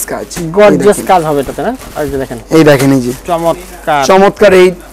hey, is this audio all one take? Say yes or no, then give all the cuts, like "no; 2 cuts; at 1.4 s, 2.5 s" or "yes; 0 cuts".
yes; 0 cuts